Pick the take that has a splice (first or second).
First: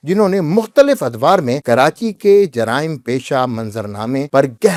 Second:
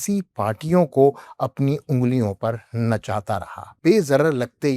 second